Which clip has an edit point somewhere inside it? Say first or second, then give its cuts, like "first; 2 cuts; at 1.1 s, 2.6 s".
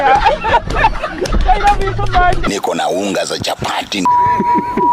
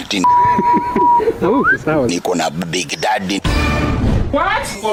first; 1 cut; at 2.4 s